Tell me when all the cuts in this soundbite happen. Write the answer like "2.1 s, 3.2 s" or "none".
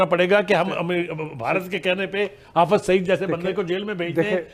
none